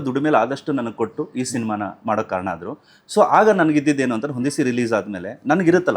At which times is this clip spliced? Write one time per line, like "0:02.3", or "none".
none